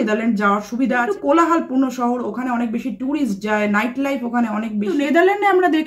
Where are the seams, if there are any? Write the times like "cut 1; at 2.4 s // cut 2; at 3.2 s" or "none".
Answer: cut 1; at 1.1 s // cut 2; at 5.0 s